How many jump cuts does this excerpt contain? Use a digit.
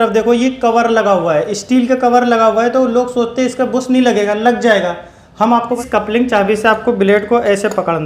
1